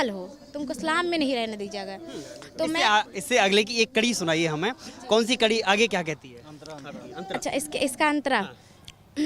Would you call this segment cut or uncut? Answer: uncut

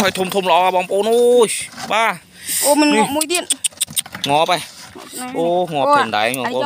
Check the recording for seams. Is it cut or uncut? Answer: uncut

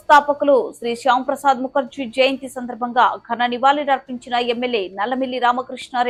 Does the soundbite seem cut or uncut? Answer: uncut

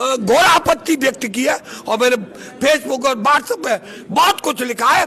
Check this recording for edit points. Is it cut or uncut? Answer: uncut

